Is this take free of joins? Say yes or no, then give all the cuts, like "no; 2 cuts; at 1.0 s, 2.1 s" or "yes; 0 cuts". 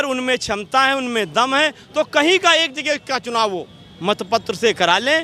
yes; 0 cuts